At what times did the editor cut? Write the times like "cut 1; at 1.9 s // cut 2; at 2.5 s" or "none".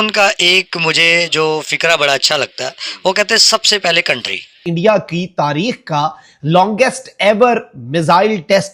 cut 1; at 4.6 s

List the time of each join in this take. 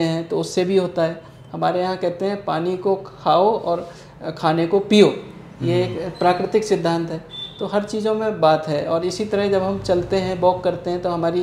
none

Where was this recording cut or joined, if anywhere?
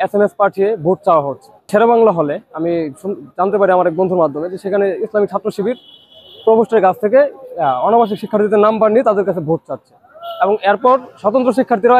cut 1; at 1.7 s

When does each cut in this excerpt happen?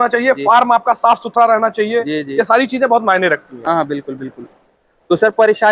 none

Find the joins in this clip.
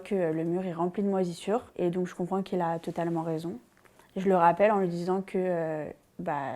none

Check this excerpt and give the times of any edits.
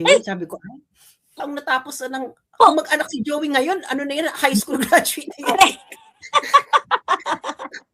cut 1; at 1.3 s

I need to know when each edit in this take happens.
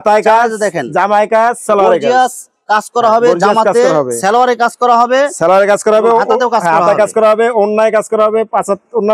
none

